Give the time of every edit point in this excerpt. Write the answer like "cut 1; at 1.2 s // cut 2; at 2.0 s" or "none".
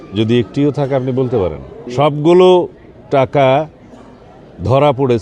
cut 1; at 1.7 s